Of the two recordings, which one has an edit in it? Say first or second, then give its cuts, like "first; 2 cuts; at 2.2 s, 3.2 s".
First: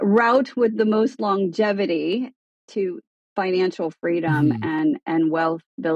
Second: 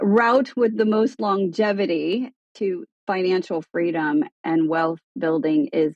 second; 2 cuts; at 2.7 s, 4.4 s